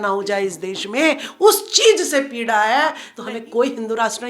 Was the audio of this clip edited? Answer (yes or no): yes